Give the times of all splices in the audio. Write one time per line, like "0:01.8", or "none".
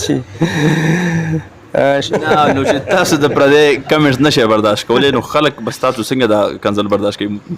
0:02.1